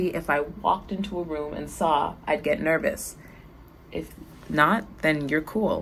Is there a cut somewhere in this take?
no; 0 cuts

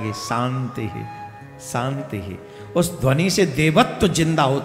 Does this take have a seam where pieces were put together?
no; 0 cuts

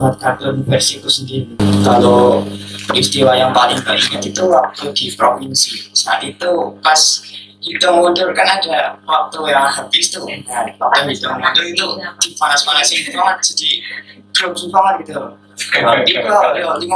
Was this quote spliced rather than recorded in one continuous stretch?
yes; 1 cut; at 1.5 s

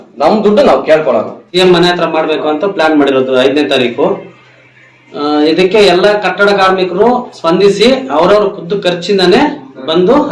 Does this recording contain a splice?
yes; 1 cut; at 1.4 s

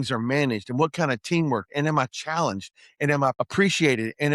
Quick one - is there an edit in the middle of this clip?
yes; 1 cut; at 3.4 s

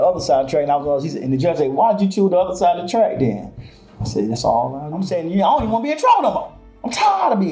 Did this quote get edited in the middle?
yes; 1 cut; at 5.1 s

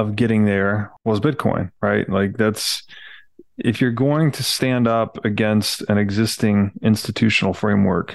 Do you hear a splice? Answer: yes; 1 cut; at 0.9 s

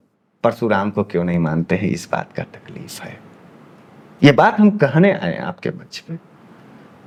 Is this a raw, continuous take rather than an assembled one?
yes; 0 cuts

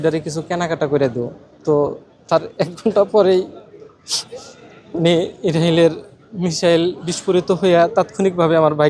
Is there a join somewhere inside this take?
no; 0 cuts

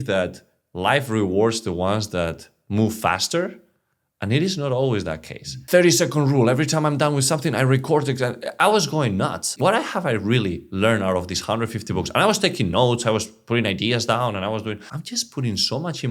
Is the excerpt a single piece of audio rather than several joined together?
no; 3 cuts; at 5.5 s, 9.5 s, 14.9 s

